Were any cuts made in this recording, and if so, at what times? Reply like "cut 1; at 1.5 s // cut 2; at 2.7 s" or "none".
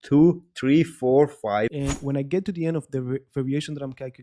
cut 1; at 1.8 s